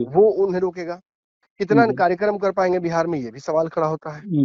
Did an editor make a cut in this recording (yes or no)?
no